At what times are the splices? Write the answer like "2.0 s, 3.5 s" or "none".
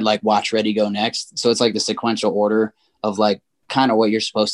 none